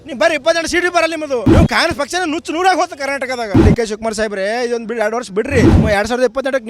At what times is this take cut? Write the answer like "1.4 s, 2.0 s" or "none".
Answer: 1.5 s, 3.6 s, 5.8 s